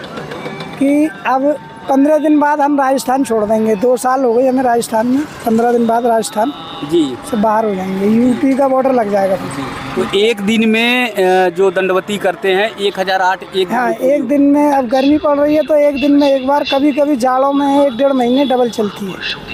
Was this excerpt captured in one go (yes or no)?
yes